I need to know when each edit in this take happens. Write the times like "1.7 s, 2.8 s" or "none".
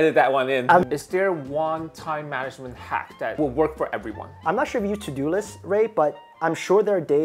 0.8 s, 4.3 s